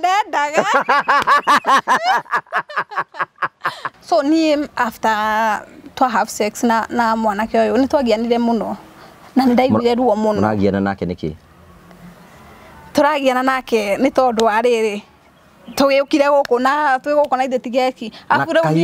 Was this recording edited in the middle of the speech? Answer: yes; 1 cut; at 3.9 s

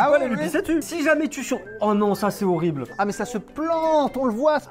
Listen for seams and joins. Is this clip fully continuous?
no; 2 cuts; at 0.8 s, 3.0 s

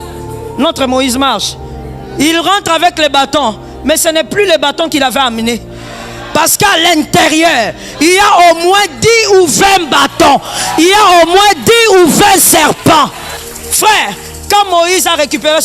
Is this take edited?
yes; 1 cut; at 13.3 s

